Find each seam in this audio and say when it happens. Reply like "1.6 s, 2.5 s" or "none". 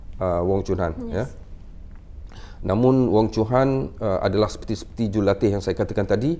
none